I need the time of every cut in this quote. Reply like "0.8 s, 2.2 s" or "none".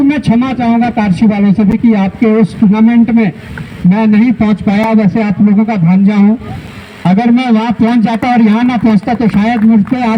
none